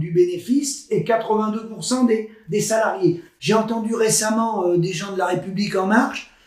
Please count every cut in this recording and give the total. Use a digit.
1